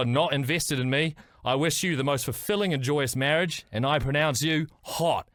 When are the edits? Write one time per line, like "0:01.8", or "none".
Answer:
none